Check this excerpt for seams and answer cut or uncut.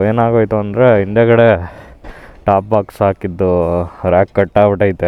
uncut